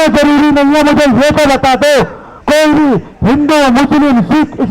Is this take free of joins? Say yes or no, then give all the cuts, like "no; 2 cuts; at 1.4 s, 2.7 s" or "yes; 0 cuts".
yes; 0 cuts